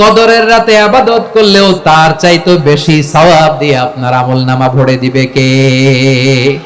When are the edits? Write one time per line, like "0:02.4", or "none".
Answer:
0:01.6